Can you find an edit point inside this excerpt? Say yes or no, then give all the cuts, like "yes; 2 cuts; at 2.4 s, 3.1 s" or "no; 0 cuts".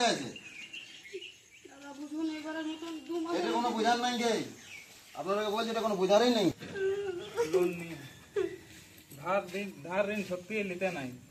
yes; 1 cut; at 6.6 s